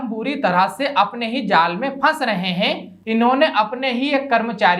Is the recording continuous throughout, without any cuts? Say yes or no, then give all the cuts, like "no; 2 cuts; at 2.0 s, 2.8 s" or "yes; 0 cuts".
no; 1 cut; at 2.9 s